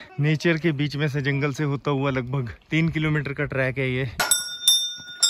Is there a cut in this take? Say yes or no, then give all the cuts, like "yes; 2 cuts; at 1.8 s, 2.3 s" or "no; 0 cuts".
yes; 1 cut; at 4.1 s